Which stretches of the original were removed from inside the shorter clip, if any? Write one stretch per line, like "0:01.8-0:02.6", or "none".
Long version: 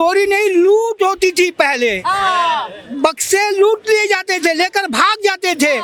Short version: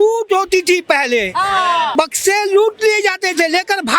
0:02.6-0:03.0